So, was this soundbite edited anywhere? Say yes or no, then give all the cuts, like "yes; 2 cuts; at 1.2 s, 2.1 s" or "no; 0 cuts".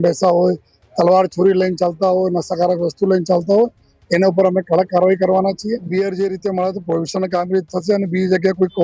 yes; 1 cut; at 5.9 s